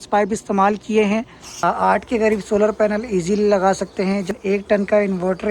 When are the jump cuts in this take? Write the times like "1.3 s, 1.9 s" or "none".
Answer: 1.6 s, 4.4 s

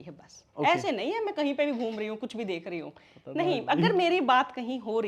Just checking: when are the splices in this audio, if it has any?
none

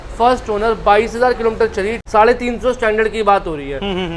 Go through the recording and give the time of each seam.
2.0 s

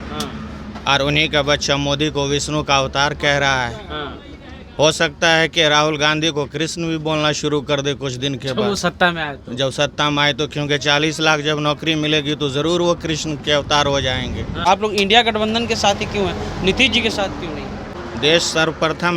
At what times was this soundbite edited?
14.6 s, 17.9 s

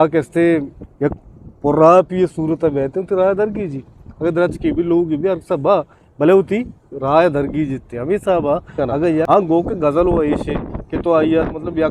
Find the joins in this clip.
9.3 s

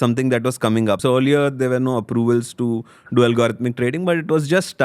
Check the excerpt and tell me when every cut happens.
1.0 s

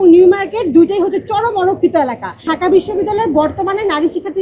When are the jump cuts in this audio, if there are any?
2.5 s

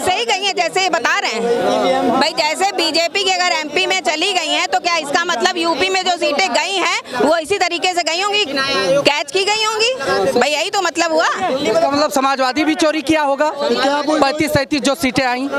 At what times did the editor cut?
none

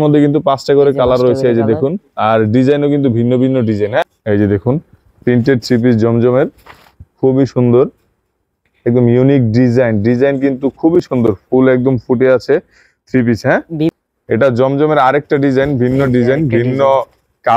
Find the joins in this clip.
4.1 s, 13.9 s

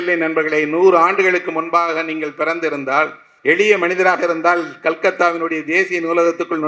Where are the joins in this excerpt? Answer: 3.2 s

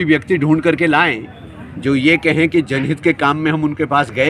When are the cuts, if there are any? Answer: none

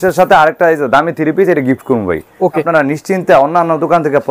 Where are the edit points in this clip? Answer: 2.7 s

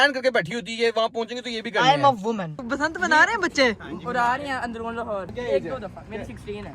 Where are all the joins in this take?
2.6 s, 5.3 s

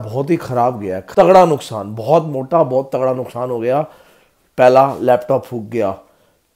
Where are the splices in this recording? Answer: 1.0 s

